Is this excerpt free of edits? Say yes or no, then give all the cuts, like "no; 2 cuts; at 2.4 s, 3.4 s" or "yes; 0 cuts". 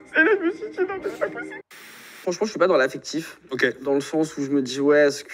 no; 1 cut; at 2.0 s